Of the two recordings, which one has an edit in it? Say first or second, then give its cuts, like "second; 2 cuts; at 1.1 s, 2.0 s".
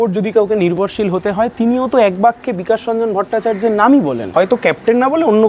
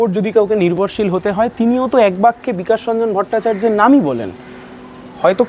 first; 1 cut; at 4.2 s